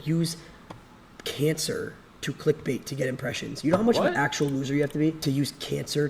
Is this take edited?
yes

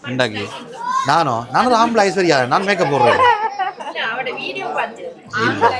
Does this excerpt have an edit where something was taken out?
yes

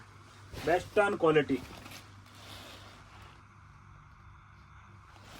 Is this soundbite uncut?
yes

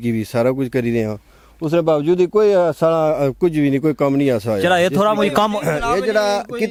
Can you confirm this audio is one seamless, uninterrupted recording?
yes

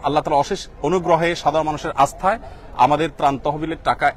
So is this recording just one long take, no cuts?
yes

